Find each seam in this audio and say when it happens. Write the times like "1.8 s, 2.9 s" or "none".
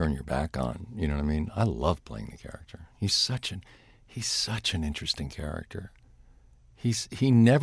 none